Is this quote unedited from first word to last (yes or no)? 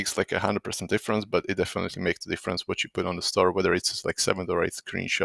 yes